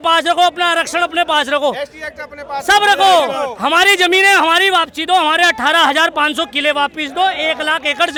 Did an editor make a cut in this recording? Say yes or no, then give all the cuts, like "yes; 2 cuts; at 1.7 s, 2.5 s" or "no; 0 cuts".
no; 0 cuts